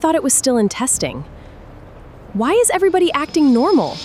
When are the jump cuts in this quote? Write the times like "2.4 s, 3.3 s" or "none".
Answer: none